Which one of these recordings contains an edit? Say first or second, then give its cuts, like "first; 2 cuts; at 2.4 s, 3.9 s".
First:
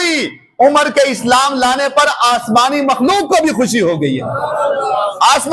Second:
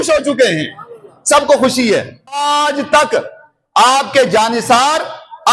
second; 1 cut; at 2.4 s